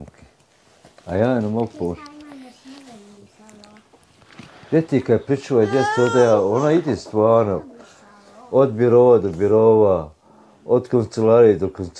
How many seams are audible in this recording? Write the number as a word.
zero